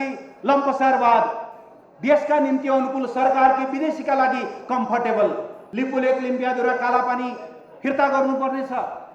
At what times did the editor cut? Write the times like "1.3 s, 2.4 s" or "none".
5.6 s